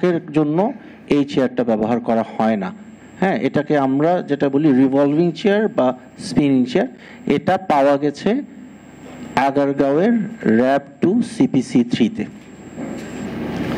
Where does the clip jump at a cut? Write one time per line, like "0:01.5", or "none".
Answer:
none